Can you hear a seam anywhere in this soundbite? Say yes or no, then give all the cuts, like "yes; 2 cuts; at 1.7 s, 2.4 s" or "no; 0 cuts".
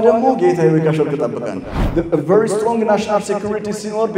yes; 1 cut; at 1.7 s